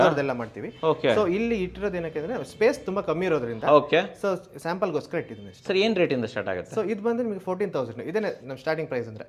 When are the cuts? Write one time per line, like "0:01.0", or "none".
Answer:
none